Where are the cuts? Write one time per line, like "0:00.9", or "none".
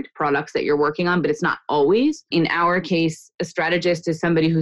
0:02.2